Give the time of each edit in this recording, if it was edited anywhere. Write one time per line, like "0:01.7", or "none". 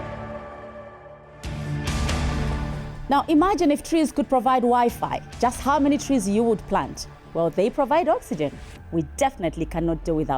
0:01.2